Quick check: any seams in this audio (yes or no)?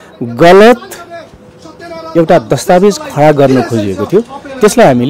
no